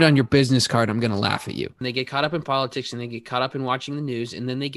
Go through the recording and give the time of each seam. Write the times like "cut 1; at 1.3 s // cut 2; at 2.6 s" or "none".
cut 1; at 1.8 s